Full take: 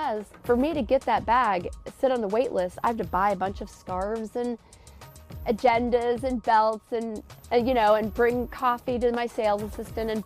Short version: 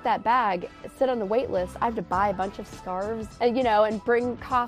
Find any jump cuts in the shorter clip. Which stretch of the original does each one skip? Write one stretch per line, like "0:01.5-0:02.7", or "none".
0:04.3-0:07.3

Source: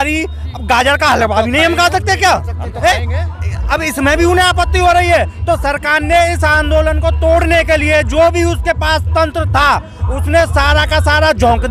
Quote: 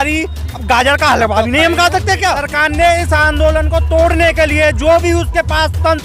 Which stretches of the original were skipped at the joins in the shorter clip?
0:02.5-0:05.8

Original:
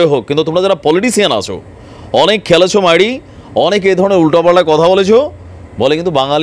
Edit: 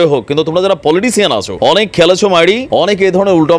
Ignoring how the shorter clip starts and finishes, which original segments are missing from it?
0:01.5-0:02.0
0:03.2-0:03.5

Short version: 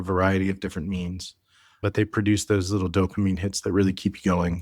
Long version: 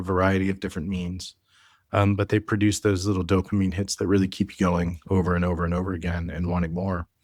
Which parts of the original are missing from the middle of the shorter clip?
0:01.8-0:02.2

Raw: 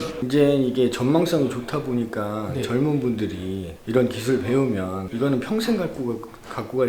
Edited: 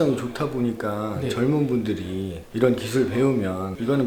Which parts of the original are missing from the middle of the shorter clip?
none

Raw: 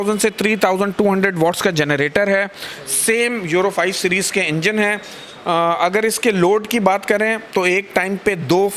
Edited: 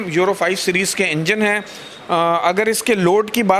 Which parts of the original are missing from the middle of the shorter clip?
none

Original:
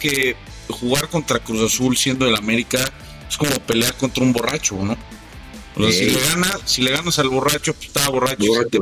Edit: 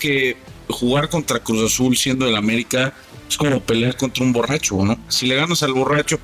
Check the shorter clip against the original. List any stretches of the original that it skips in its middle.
0:05.1-0:06.7

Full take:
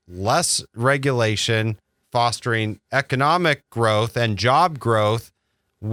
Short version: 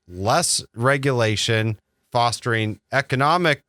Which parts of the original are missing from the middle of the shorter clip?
none

